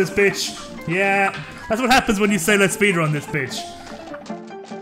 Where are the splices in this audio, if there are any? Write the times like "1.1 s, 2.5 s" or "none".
none

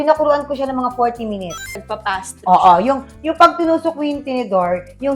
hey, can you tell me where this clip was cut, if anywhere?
1.7 s

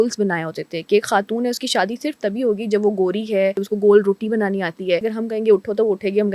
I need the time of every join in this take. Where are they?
3.6 s, 5.1 s

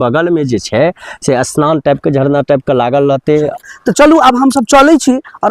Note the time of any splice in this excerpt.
3.5 s

